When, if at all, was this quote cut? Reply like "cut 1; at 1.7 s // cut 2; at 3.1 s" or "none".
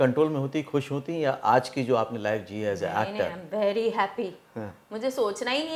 none